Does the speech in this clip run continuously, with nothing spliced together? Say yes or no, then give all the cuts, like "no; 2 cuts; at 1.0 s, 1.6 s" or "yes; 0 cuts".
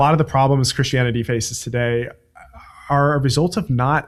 yes; 0 cuts